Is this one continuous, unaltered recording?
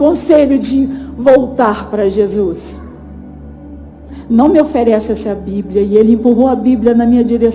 yes; 0 cuts

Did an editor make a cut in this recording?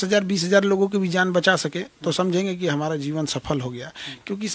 no; 0 cuts

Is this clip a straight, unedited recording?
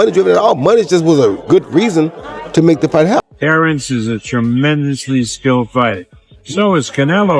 no; 1 cut; at 3.2 s

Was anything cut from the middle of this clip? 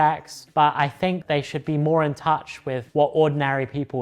no; 0 cuts

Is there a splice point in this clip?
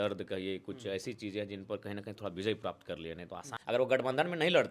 yes; 1 cut; at 3.5 s

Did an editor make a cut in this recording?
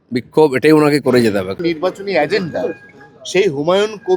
yes; 1 cut; at 1.5 s

